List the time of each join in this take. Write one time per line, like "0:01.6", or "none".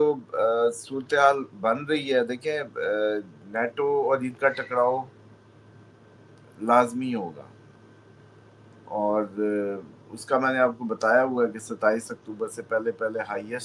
none

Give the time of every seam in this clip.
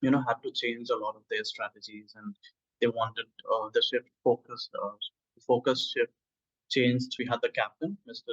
0:07.1

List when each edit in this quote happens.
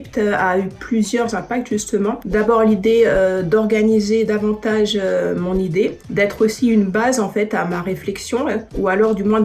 none

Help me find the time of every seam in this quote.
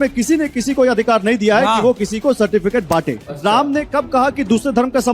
0:03.2

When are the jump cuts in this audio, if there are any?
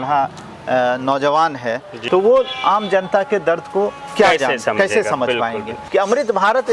0:01.9
0:05.8

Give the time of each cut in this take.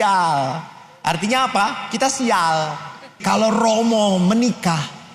0:03.2

